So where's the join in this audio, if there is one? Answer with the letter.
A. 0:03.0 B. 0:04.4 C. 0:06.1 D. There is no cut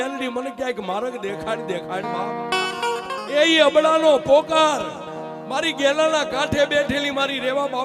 A